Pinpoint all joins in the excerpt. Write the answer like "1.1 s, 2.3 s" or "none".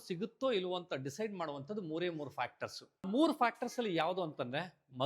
3.1 s

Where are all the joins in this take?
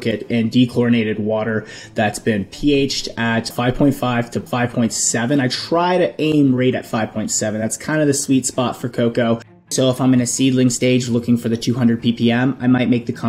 3.5 s, 4.4 s, 9.7 s

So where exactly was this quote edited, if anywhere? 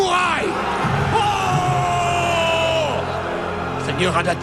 none

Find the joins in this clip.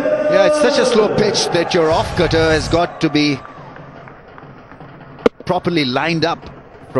none

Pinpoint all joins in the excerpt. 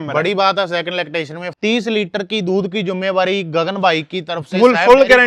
1.4 s

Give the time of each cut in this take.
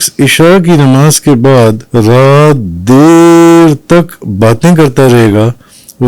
1.8 s

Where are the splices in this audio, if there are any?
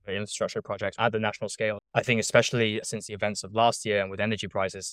0.9 s, 1.8 s

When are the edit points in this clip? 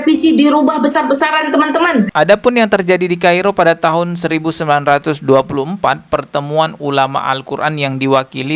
2.1 s

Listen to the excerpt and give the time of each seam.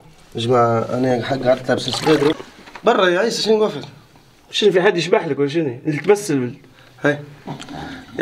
2.4 s

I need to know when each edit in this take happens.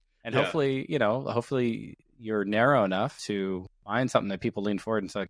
3.2 s

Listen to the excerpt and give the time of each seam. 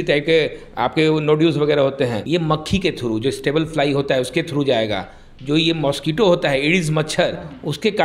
2.2 s

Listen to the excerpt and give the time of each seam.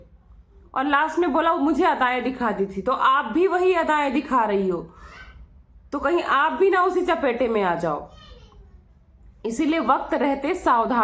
none

